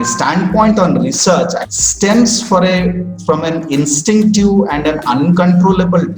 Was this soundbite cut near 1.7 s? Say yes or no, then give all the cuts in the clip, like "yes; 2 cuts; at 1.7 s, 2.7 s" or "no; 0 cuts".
yes; 1 cut; at 1.7 s